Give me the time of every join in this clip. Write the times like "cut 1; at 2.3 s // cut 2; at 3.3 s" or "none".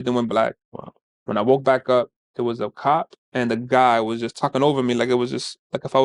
none